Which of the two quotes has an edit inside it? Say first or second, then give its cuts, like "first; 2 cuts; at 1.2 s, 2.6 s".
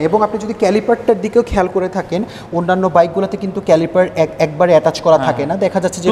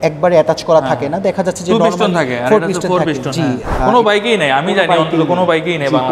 second; 1 cut; at 3.6 s